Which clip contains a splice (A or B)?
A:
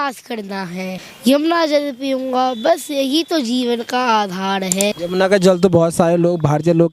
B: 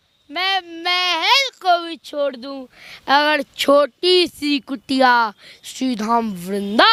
A